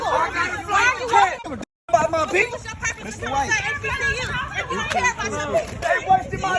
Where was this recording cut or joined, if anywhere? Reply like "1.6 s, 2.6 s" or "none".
1.4 s, 5.8 s